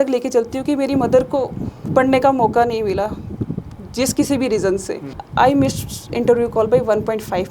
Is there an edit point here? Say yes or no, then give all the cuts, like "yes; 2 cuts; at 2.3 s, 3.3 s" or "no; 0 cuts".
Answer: yes; 1 cut; at 5.2 s